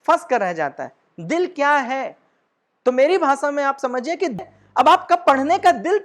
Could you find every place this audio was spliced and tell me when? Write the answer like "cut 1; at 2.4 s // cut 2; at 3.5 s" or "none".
cut 1; at 4.4 s